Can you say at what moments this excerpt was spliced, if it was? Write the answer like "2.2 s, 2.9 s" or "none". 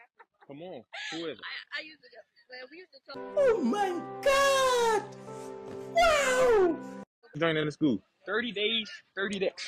7.4 s